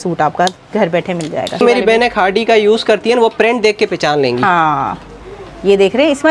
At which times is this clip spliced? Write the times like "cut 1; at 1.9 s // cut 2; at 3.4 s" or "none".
cut 1; at 1.6 s